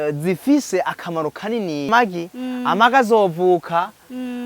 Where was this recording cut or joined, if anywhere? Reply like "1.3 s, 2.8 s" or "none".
1.9 s